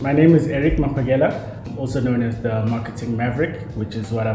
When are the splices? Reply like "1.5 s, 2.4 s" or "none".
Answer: 1.7 s